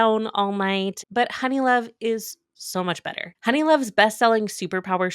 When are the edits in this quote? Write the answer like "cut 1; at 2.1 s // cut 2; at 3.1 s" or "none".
cut 1; at 1.0 s // cut 2; at 3.3 s